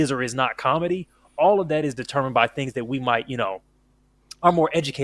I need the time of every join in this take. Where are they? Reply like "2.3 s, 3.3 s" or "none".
none